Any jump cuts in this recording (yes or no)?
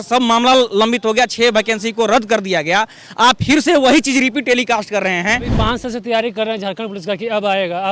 yes